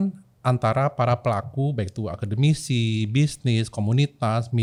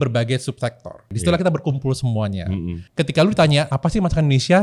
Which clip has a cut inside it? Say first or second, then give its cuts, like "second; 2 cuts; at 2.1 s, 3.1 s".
second; 3 cuts; at 1.1 s, 2.8 s, 3.7 s